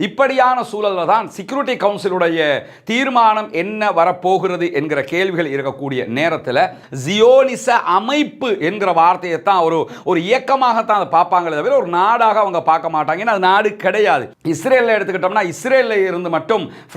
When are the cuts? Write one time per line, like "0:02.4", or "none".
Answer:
0:06.9
0:14.3